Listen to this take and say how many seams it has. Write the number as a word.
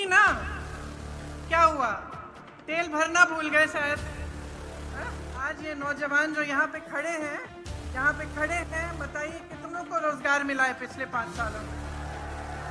two